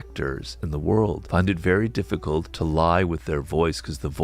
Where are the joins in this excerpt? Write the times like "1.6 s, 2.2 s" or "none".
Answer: 1.2 s, 2.5 s